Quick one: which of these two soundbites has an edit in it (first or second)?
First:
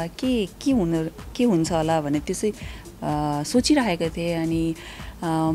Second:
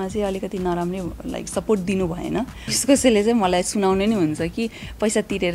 second